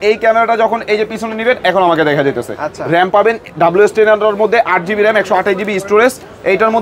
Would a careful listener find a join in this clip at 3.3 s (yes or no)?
no